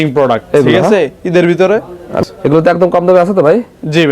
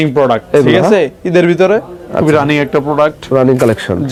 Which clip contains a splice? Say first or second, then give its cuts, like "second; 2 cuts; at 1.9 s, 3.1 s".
first; 1 cut; at 2.1 s